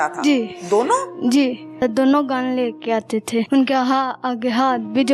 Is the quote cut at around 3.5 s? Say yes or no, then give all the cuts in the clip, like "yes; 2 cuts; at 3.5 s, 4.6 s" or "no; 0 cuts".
yes; 2 cuts; at 1.8 s, 3.5 s